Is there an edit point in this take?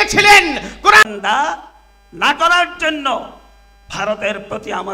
yes; 1 cut; at 1.0 s

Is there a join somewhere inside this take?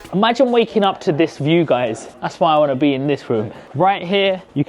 yes; 1 cut; at 3.6 s

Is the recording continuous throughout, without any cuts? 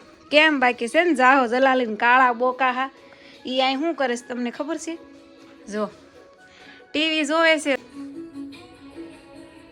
no; 1 cut; at 7.8 s

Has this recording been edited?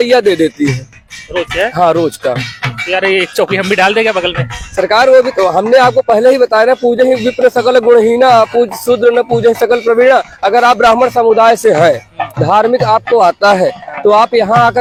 no; 0 cuts

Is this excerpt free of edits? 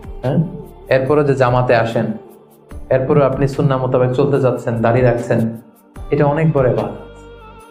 yes; 0 cuts

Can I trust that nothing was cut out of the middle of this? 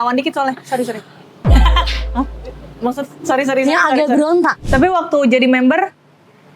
no; 1 cut; at 4.6 s

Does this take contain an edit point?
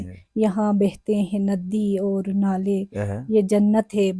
no; 0 cuts

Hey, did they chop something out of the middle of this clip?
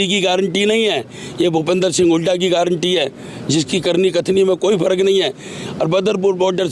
no; 0 cuts

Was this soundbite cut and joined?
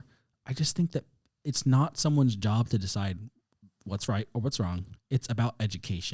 no; 0 cuts

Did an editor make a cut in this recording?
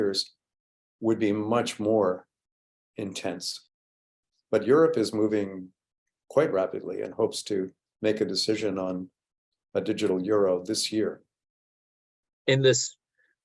yes; 2 cuts; at 3.9 s, 11.9 s

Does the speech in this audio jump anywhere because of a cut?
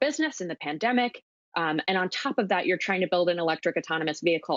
no; 0 cuts

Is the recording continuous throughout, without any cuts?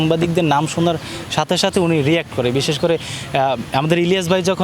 yes; 0 cuts

